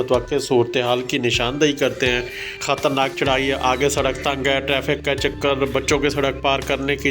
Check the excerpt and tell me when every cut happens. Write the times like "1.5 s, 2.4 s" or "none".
2.6 s